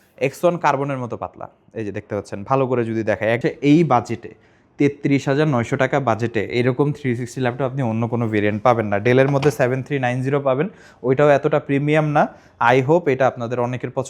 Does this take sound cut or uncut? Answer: cut